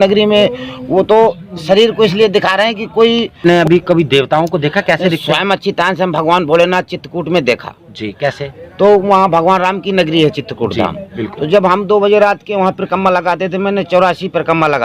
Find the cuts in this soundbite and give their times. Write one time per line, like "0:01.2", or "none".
0:03.4